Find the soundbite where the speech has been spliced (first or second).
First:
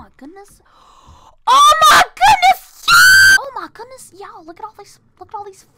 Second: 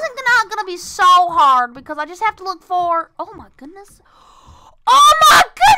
first